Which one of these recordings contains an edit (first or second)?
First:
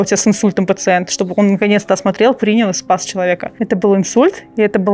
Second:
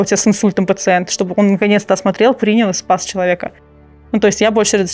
first